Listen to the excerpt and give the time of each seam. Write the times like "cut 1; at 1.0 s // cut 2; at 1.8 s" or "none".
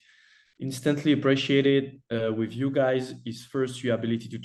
none